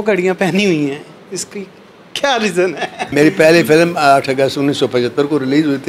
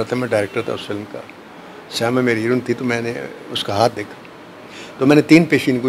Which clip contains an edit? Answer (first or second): first